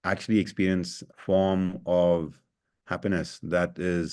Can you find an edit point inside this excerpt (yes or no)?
yes